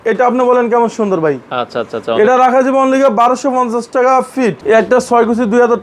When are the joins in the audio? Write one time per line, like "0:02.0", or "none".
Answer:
0:04.6